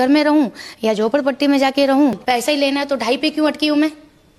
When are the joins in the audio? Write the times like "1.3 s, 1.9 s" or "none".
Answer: 2.2 s